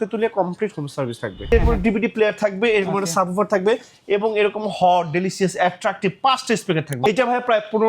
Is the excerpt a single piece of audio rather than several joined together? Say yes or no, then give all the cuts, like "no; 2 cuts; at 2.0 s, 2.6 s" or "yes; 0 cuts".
no; 2 cuts; at 1.5 s, 7.1 s